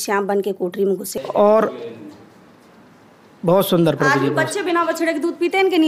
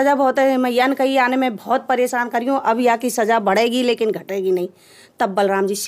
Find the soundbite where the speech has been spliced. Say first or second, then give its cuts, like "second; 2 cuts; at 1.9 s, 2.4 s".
first; 1 cut; at 1.1 s